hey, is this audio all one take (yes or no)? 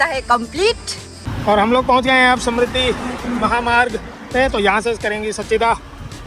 no